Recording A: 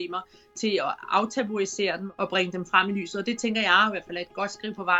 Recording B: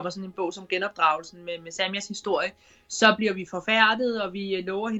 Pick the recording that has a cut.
A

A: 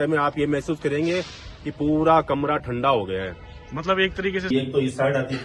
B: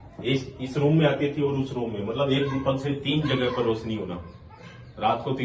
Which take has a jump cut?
A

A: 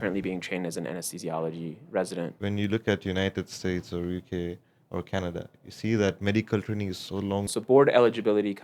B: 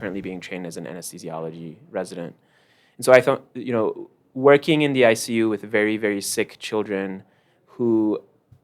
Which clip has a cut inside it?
A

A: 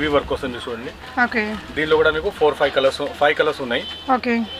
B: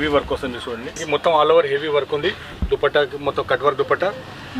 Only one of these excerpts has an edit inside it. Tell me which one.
B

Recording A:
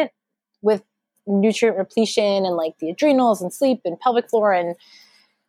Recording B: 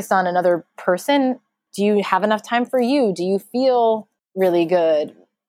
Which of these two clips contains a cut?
B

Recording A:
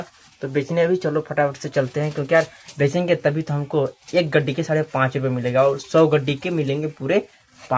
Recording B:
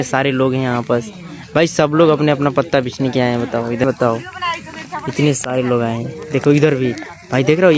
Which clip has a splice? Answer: B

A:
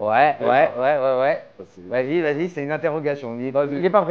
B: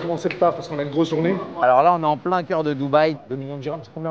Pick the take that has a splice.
B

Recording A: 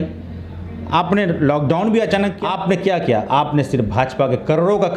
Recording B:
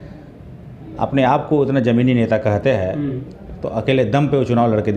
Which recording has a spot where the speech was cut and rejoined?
A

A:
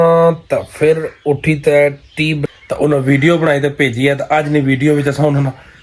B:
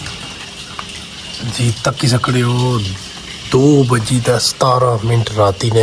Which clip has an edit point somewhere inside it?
A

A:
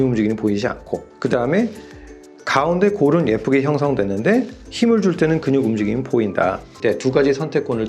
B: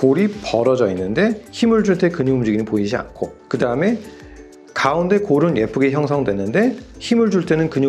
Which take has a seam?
A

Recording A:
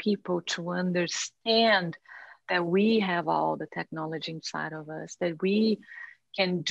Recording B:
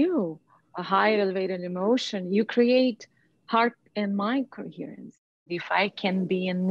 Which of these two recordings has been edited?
B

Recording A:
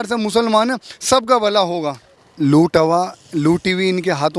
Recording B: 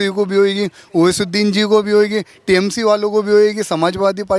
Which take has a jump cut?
A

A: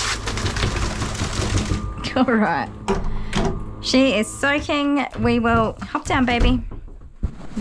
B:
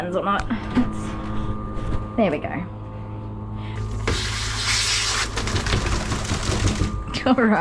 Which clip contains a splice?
B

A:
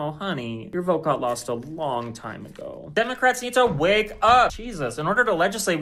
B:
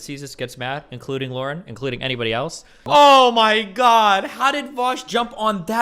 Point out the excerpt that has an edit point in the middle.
B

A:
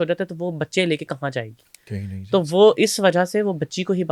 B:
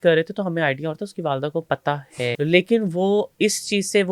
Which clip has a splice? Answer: B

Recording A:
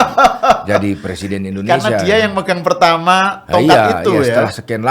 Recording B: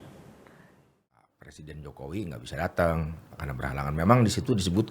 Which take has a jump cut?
B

